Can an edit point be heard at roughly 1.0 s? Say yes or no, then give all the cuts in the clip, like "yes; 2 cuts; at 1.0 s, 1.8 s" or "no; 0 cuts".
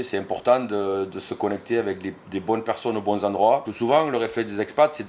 no; 1 cut; at 3.7 s